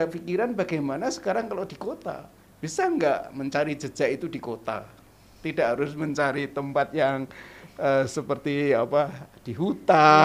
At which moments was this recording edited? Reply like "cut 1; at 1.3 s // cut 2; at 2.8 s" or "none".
none